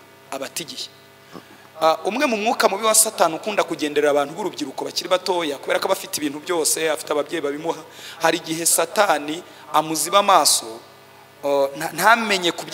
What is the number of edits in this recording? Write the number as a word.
zero